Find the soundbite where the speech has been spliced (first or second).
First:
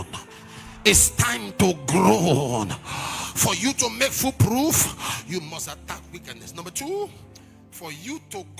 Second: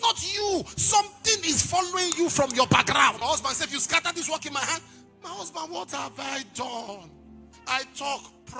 second